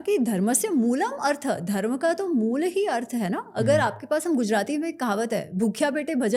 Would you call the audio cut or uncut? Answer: uncut